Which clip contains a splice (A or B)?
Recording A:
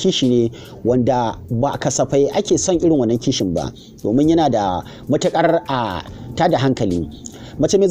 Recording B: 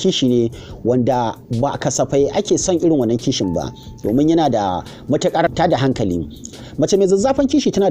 B